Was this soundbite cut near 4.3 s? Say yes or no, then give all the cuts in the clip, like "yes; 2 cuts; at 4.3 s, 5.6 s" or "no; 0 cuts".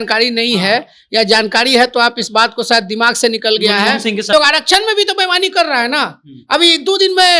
yes; 1 cut; at 4.3 s